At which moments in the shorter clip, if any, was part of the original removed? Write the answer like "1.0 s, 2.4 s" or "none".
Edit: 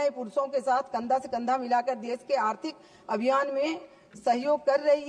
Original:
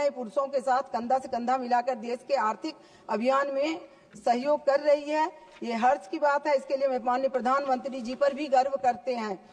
none